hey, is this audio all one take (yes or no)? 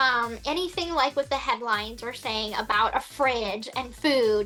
yes